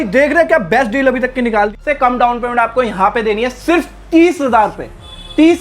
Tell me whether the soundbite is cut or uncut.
cut